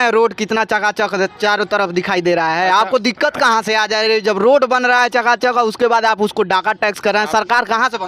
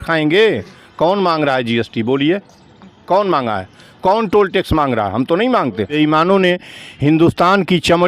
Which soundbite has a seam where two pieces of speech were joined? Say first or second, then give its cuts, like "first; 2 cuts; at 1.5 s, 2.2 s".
second; 1 cut; at 6.0 s